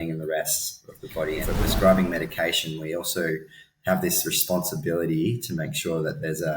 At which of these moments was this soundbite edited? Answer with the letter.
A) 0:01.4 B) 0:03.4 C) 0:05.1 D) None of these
A